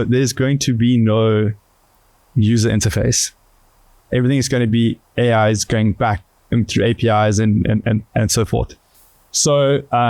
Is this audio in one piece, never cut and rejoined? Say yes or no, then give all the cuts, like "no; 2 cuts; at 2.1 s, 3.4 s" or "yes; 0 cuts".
yes; 0 cuts